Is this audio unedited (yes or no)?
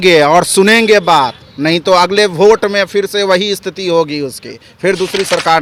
yes